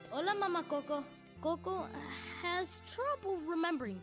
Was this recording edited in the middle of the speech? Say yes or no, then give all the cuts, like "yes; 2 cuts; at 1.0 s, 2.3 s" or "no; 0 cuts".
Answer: yes; 1 cut; at 1.2 s